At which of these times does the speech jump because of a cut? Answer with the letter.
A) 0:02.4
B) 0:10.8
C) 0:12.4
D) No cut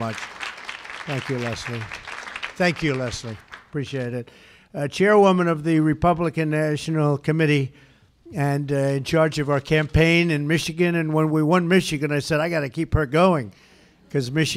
D